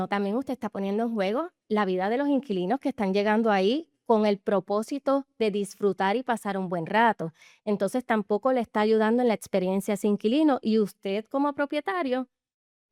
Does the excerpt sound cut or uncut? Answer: uncut